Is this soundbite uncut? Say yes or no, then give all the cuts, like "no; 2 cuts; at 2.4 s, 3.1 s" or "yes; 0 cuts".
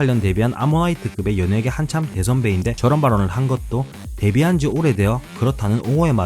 no; 1 cut; at 2.8 s